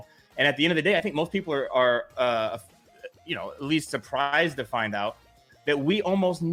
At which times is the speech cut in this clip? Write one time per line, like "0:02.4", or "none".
none